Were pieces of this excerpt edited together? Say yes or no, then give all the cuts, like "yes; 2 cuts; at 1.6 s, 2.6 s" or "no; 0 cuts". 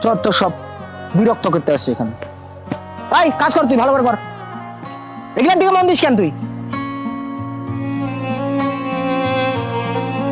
yes; 1 cut; at 6.4 s